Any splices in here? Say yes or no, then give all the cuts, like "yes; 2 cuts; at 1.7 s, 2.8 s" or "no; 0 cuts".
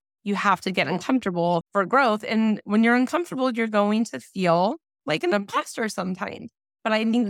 yes; 1 cut; at 1.7 s